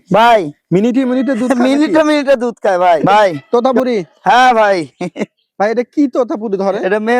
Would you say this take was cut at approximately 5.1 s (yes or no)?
no